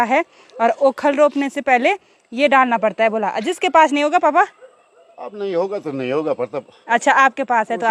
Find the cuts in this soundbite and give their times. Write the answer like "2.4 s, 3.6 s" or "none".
none